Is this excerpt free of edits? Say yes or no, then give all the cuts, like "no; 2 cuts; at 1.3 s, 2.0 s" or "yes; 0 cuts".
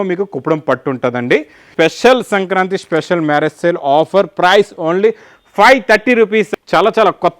no; 2 cuts; at 1.7 s, 6.5 s